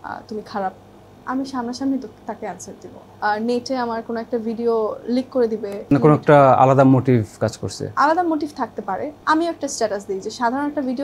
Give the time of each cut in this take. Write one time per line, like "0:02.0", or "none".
0:03.0
0:05.9
0:09.1